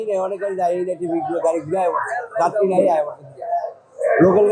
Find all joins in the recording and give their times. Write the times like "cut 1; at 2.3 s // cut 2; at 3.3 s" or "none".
none